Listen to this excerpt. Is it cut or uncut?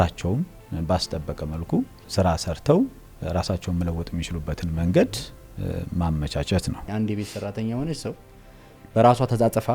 cut